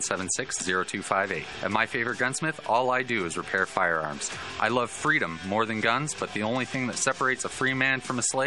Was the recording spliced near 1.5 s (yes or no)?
no